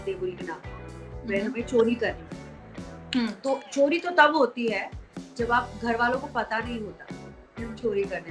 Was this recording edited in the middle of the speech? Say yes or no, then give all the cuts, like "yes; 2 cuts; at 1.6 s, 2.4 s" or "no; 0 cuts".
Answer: no; 0 cuts